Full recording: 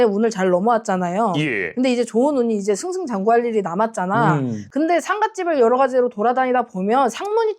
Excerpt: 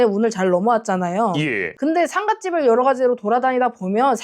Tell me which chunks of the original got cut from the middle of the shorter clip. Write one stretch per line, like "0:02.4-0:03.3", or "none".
0:01.7-0:04.6